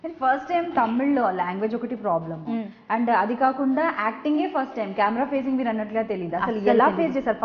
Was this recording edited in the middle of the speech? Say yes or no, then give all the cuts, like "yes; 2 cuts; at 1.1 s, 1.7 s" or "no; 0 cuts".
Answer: no; 0 cuts